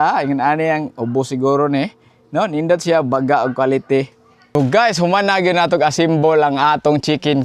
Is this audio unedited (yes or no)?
no